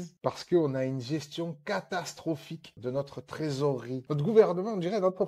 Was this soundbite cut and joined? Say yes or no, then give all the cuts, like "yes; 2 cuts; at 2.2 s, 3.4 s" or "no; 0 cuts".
no; 0 cuts